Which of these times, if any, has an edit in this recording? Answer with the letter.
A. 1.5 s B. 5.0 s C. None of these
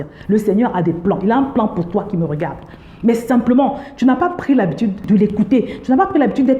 B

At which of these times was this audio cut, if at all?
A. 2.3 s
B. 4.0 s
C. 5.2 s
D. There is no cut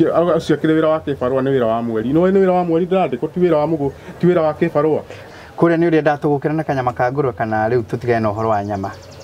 C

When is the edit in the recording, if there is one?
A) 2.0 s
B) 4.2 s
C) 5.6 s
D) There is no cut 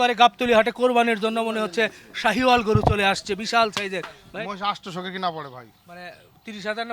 B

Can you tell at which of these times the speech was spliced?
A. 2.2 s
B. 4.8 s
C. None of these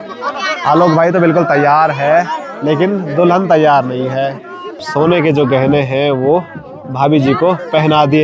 B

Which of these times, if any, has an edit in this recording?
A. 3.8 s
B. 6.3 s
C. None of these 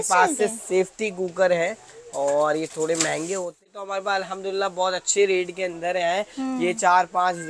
A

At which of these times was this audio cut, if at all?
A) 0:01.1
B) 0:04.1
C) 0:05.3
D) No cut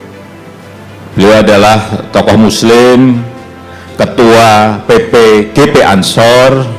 A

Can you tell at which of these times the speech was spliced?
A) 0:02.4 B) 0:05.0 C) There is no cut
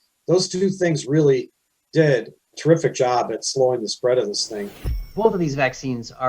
B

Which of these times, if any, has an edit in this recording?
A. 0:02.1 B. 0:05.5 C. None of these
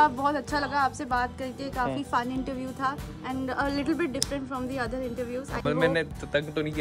C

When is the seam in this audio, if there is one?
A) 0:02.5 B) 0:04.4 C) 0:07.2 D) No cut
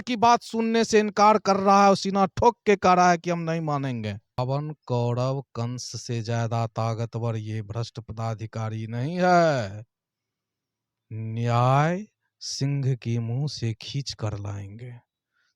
B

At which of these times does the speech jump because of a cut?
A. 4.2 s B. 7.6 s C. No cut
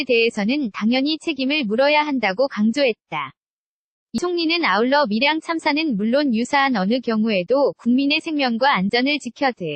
A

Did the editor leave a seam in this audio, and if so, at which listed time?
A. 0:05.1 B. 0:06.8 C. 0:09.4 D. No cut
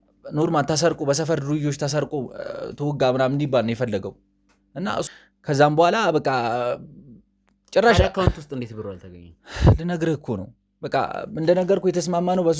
A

